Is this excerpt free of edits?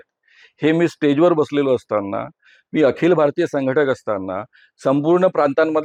yes; 0 cuts

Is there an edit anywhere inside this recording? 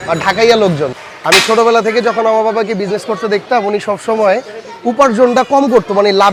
no; 0 cuts

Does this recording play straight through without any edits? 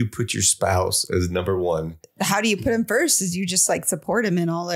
no; 1 cut; at 2.0 s

